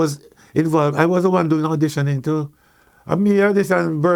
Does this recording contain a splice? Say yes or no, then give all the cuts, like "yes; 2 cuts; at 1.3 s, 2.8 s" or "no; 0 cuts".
no; 0 cuts